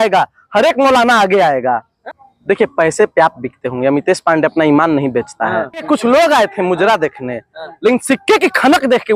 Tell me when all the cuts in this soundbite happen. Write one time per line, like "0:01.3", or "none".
0:01.9
0:05.7